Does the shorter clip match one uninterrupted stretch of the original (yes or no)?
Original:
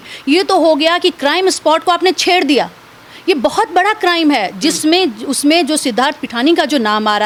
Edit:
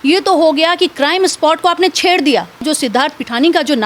no